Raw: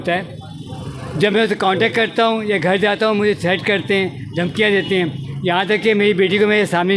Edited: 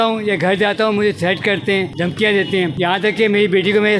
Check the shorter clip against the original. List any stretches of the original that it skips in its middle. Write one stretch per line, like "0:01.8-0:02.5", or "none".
0:04.1-0:04.3
0:05.1-0:05.4